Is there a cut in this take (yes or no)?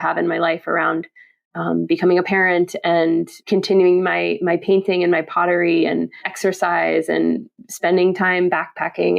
yes